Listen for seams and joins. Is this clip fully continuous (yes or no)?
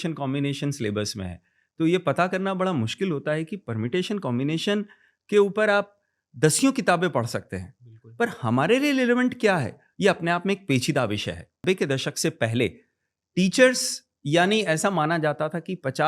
no